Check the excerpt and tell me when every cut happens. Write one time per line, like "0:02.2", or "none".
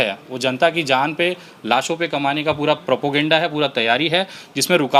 none